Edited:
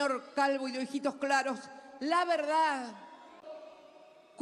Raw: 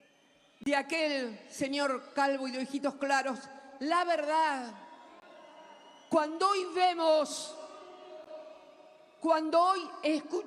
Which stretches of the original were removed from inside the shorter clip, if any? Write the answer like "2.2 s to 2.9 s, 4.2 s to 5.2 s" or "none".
5.2 s to 8.2 s

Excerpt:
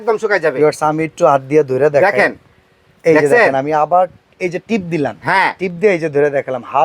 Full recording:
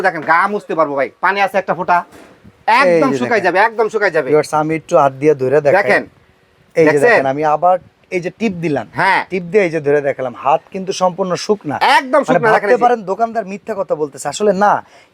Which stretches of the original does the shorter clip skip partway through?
none

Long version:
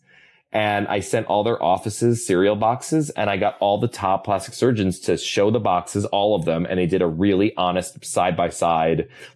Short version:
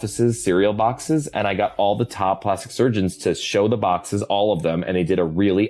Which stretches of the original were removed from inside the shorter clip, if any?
none

